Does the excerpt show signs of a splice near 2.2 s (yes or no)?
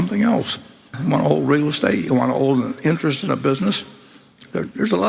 no